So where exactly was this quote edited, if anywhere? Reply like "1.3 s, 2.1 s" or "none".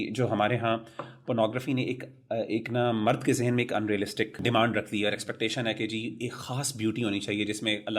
4.4 s